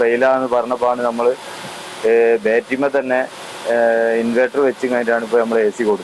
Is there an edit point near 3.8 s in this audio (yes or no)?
no